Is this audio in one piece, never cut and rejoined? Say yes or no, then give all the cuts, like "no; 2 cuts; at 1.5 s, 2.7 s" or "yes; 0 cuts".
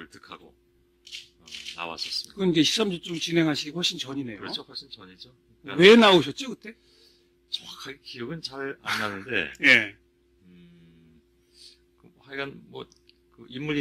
yes; 0 cuts